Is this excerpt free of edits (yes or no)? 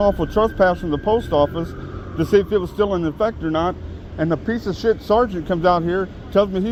yes